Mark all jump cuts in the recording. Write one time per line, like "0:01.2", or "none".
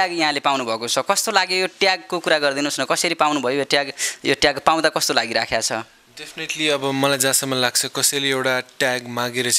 none